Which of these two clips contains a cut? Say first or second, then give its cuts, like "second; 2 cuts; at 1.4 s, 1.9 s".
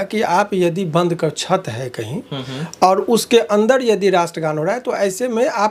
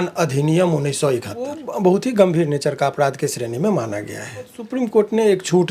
second; 2 cuts; at 1.5 s, 4.6 s